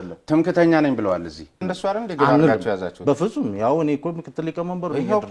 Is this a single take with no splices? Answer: no; 1 cut; at 1.7 s

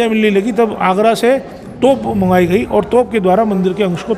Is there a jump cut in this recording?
no; 0 cuts

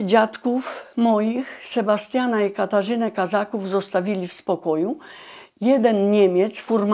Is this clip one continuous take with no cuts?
yes; 0 cuts

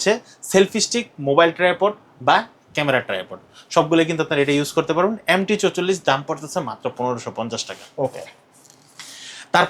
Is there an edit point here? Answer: no; 0 cuts

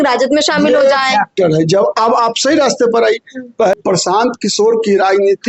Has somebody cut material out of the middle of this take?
yes; 1 cut; at 3.7 s

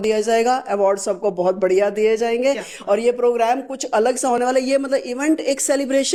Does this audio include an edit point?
no; 0 cuts

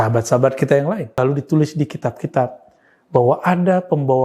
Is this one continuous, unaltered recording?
no; 1 cut; at 1.1 s

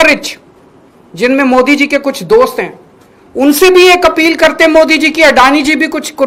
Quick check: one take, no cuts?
yes; 0 cuts

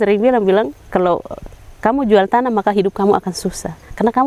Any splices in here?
no; 0 cuts

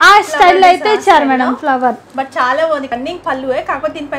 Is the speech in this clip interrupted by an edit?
yes; 1 cut; at 2.9 s

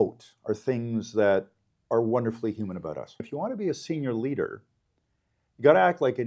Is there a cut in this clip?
yes; 1 cut; at 3.3 s

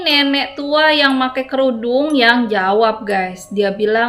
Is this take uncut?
yes; 0 cuts

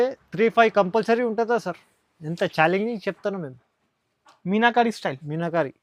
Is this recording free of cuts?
yes; 0 cuts

